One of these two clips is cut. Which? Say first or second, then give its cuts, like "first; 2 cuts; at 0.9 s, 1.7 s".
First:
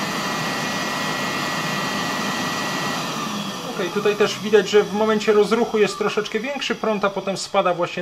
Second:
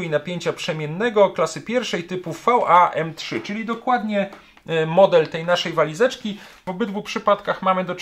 second; 1 cut; at 6.7 s